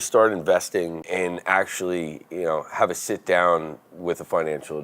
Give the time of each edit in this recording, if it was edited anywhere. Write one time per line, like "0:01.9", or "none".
0:01.1

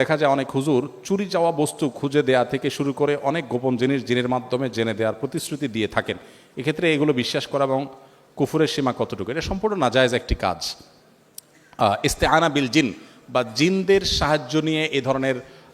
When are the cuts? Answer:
none

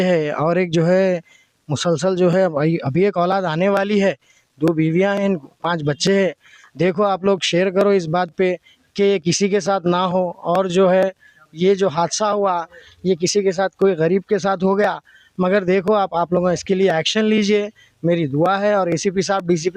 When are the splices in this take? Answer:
none

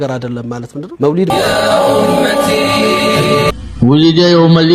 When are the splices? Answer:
0:01.3
0:03.5

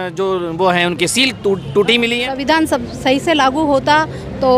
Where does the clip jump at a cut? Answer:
0:02.3

